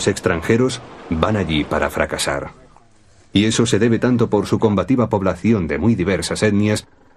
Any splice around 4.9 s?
no; 1 cut; at 1.9 s

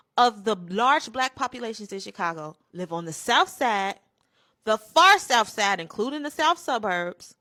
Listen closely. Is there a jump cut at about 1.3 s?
no; 0 cuts

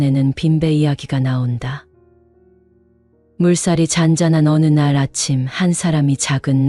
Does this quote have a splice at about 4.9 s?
no; 2 cuts; at 1.8 s, 3.3 s

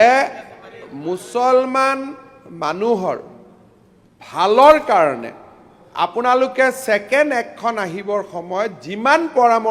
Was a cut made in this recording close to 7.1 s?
no; 0 cuts

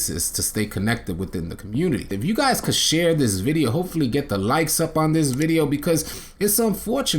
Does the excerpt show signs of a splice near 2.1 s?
yes; 1 cut; at 2.1 s

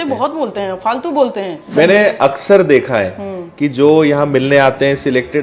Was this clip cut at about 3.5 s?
no; 1 cut; at 1.7 s

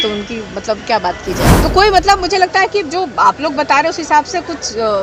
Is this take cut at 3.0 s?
no; 1 cut; at 1.6 s

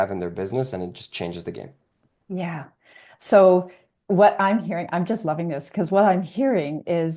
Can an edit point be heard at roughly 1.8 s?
no; 0 cuts

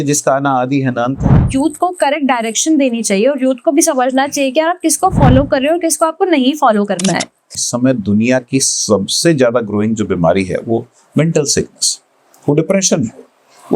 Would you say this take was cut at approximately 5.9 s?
no; 2 cuts; at 1.4 s, 7.7 s

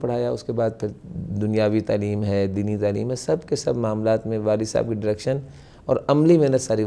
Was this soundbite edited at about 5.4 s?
no; 0 cuts

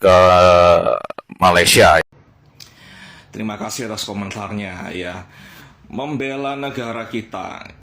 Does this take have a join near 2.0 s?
yes; 1 cut; at 2.0 s

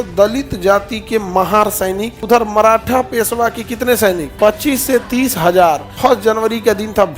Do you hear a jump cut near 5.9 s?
yes; 3 cuts; at 2.1 s, 4.3 s, 5.9 s

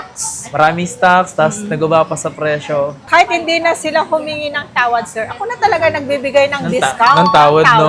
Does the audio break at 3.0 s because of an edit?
yes; 1 cut; at 3.0 s

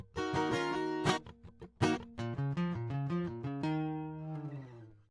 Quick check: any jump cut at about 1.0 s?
no; 1 cut; at 3.6 s

